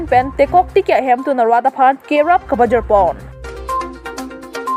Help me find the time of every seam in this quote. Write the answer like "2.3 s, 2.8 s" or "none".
none